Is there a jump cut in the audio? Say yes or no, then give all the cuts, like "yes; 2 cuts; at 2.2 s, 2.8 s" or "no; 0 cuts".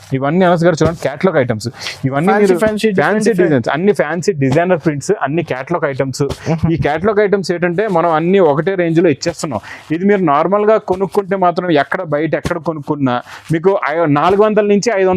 no; 0 cuts